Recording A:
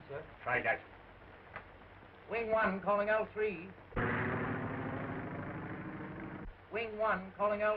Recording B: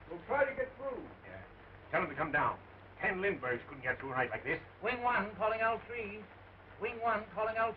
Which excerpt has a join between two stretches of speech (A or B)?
A